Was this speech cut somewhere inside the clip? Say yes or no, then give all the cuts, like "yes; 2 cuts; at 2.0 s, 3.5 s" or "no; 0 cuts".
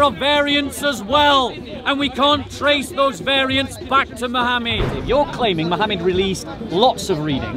yes; 1 cut; at 4.9 s